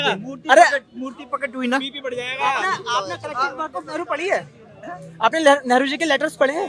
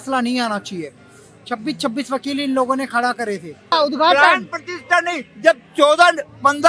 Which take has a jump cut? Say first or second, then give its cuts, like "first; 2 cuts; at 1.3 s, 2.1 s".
second; 1 cut; at 3.7 s